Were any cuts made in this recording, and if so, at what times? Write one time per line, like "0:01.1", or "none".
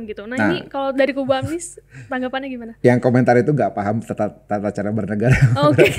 none